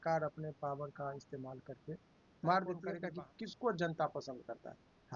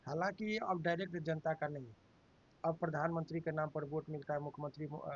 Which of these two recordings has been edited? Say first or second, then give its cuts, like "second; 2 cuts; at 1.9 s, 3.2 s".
first; 1 cut; at 2.9 s